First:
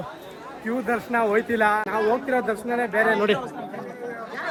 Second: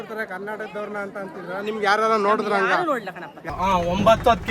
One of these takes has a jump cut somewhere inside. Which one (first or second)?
second